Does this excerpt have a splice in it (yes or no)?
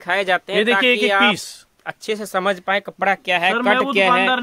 no